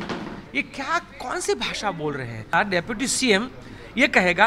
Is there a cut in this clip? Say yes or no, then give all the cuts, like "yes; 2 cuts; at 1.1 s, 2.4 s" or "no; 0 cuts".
yes; 1 cut; at 2.5 s